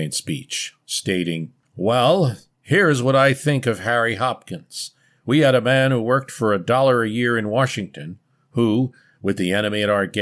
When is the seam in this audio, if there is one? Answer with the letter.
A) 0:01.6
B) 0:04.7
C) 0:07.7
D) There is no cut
A